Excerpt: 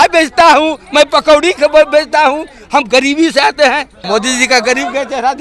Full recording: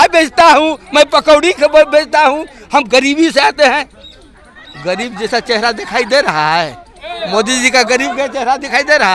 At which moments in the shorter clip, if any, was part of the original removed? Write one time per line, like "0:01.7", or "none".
0:04.0